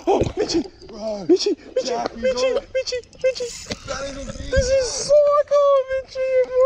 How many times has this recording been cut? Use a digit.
0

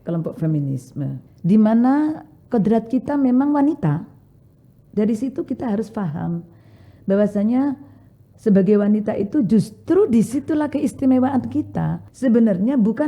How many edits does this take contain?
2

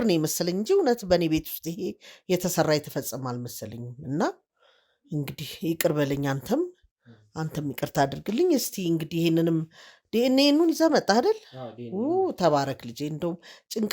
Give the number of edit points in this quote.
0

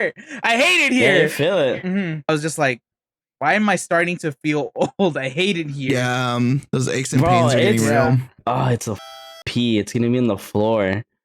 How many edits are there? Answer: 2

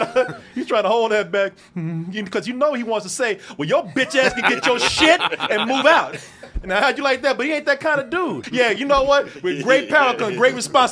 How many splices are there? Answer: 1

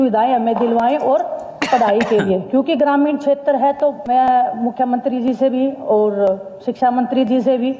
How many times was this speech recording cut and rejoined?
0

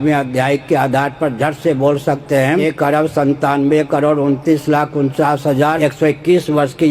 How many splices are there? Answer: 2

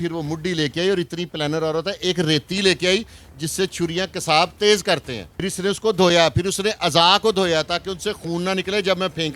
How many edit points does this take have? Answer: 1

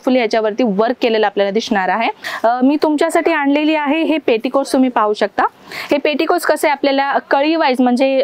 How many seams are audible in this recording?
1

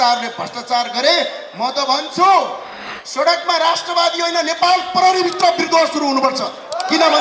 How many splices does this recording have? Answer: 0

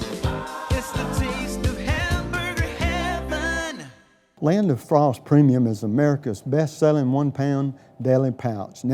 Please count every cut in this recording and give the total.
1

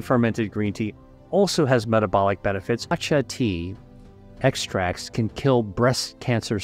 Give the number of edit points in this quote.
1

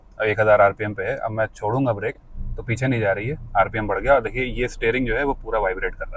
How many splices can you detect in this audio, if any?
0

